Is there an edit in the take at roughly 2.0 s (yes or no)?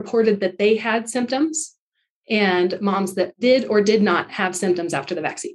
no